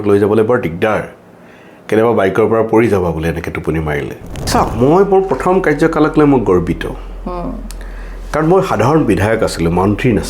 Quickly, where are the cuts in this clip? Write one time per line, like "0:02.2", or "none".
0:04.5